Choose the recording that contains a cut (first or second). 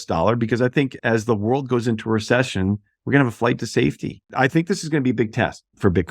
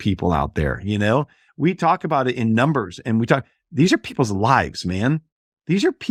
first